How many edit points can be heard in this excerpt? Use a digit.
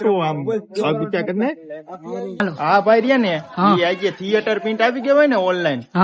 1